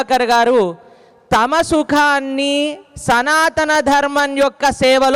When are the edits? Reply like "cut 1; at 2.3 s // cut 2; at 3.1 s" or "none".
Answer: none